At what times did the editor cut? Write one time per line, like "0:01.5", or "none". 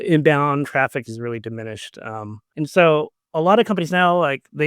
0:02.4
0:03.2